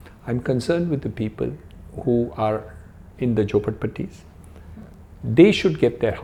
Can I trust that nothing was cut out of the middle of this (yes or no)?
yes